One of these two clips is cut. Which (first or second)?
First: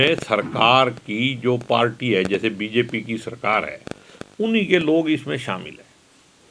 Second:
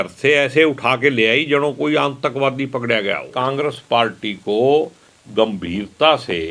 second